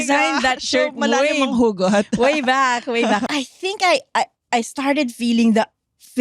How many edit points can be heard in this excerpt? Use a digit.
1